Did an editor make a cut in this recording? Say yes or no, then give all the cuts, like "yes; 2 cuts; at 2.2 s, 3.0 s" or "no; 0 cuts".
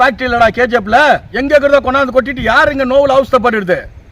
yes; 1 cut; at 1.3 s